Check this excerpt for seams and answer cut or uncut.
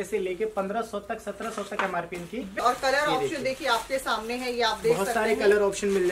cut